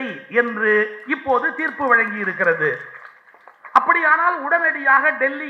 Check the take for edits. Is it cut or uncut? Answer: uncut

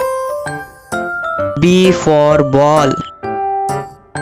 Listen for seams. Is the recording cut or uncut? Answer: cut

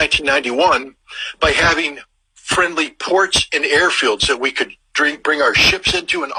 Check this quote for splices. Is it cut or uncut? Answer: uncut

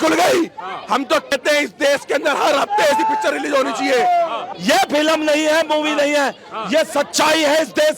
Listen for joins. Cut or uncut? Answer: cut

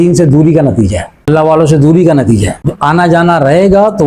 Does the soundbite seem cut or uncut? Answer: cut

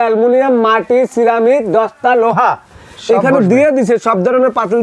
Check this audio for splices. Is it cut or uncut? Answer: uncut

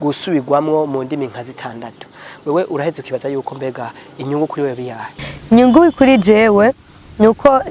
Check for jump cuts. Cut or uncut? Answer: uncut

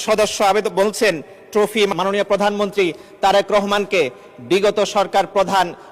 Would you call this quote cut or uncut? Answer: cut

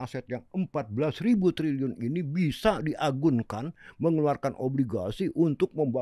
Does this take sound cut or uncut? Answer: uncut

